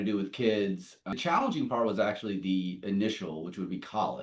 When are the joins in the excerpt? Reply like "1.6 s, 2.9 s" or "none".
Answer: 1.1 s